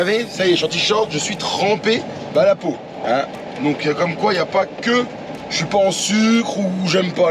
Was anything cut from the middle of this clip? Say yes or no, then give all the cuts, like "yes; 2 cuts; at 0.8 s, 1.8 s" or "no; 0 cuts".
no; 0 cuts